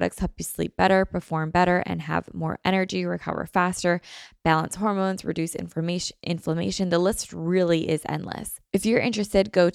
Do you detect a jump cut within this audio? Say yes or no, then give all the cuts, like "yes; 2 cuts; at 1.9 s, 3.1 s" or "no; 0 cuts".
yes; 1 cut; at 8.5 s